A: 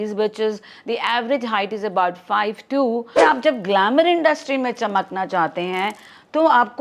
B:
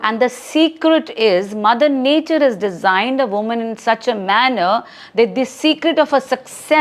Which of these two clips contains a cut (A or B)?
A